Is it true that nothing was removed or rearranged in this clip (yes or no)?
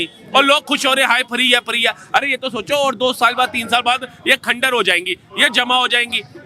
yes